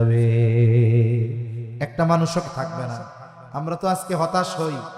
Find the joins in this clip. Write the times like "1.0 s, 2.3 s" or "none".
2.5 s